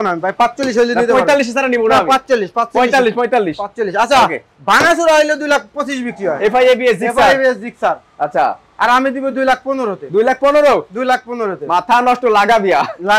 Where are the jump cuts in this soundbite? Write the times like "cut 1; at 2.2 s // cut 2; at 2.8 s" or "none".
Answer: none